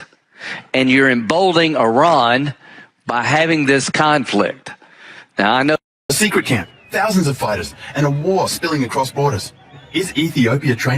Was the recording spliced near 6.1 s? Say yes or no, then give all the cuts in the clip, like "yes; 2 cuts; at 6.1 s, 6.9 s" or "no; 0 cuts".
yes; 1 cut; at 6.1 s